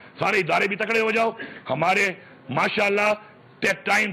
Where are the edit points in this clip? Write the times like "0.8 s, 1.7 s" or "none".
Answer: none